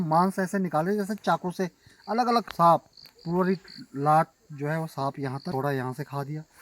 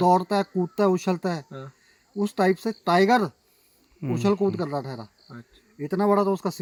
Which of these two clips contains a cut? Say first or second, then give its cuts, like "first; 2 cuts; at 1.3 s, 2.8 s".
first; 2 cuts; at 2.5 s, 5.5 s